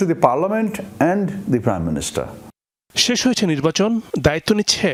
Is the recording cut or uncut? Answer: uncut